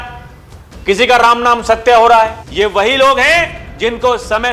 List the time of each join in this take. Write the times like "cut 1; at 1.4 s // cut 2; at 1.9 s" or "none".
cut 1; at 2.4 s